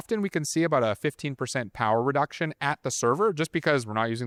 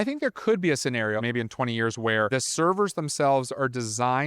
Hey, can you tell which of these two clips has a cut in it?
second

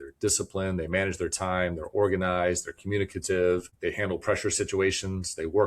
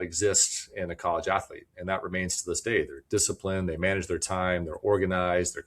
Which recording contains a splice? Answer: first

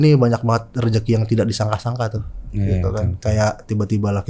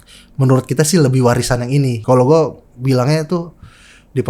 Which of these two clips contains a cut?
second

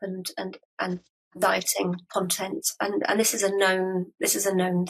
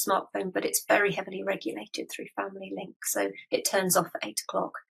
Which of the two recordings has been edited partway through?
first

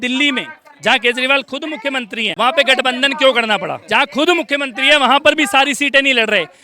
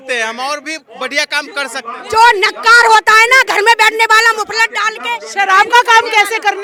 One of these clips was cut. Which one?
first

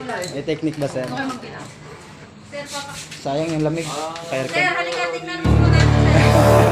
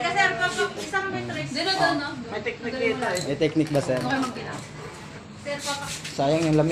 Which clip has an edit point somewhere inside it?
first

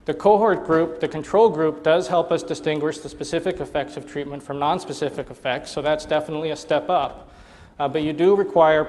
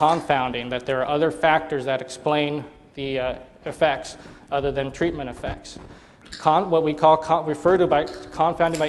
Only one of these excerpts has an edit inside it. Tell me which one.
second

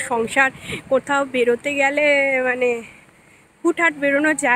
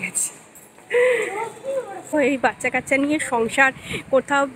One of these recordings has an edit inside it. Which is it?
second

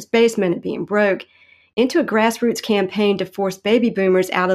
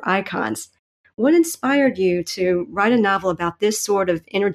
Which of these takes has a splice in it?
second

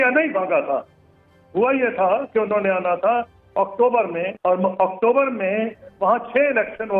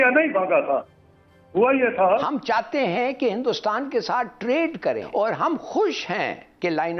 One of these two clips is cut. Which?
second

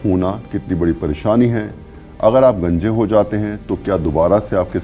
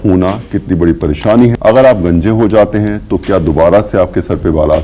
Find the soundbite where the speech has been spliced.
second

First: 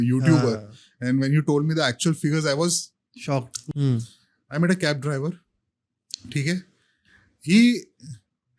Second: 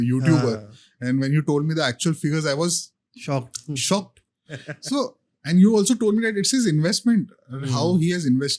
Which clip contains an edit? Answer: first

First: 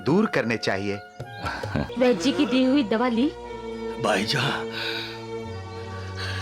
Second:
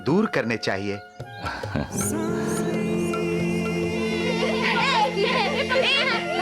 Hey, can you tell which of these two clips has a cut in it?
first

